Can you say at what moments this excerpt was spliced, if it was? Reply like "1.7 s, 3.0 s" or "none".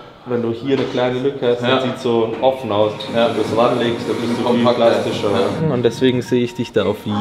5.6 s